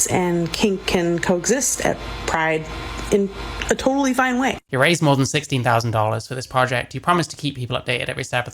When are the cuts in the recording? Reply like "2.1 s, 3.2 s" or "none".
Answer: 4.6 s